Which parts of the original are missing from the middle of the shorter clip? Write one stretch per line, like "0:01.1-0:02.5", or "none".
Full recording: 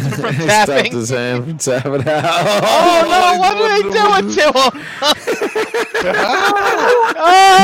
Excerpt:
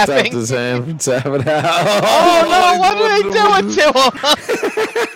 0:04.8-0:05.0